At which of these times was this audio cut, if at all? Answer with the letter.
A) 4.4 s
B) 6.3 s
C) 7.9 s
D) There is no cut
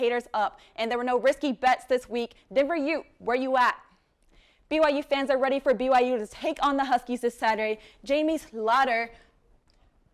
D